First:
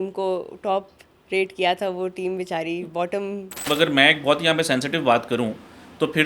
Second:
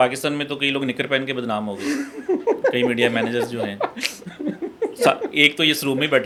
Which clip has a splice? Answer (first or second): first